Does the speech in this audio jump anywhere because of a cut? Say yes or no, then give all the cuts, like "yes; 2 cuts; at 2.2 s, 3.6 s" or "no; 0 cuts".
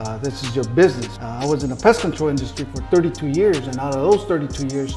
yes; 1 cut; at 1.1 s